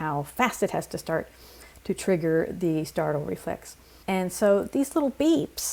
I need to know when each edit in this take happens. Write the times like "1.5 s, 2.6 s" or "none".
none